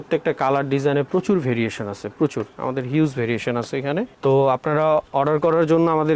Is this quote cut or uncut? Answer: uncut